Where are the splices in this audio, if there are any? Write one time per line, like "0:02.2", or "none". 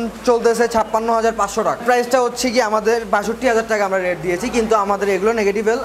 0:01.8